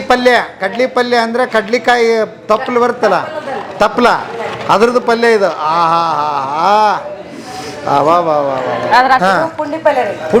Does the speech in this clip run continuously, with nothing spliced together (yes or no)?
no